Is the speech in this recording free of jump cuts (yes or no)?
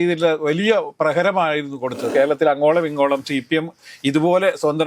no